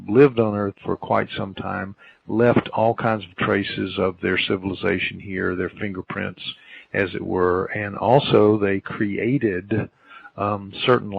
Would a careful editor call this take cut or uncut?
cut